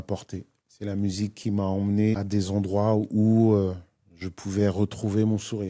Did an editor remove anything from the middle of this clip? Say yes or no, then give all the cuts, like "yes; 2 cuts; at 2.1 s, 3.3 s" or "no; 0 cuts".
yes; 1 cut; at 2.2 s